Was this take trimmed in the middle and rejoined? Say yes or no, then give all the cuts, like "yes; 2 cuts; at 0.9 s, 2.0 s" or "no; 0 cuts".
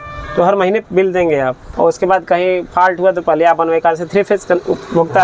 yes; 1 cut; at 1.6 s